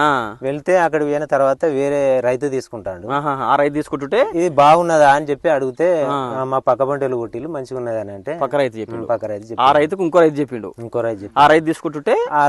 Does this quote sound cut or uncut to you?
uncut